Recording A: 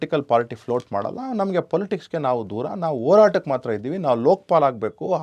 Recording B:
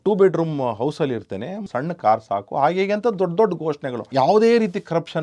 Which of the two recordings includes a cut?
B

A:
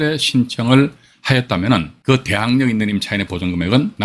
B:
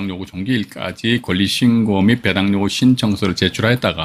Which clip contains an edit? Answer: A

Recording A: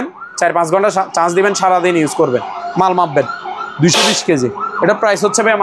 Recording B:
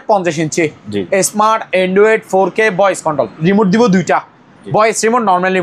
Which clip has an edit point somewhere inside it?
B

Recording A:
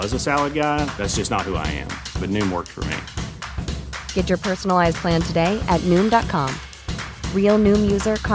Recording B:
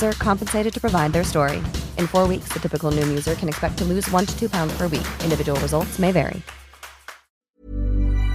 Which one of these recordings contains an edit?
B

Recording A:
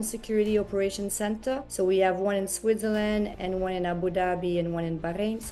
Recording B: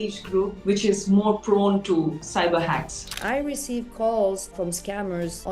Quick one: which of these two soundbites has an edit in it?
B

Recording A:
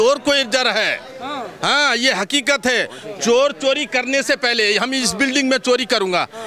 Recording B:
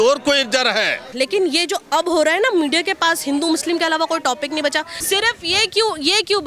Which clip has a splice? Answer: B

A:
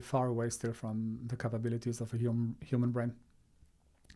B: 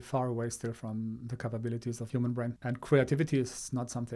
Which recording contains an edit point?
B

